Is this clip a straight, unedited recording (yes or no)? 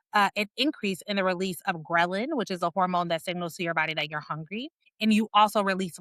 no